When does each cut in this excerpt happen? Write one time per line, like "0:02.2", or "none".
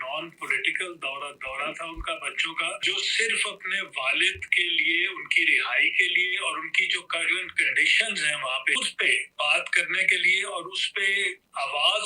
0:02.8
0:08.7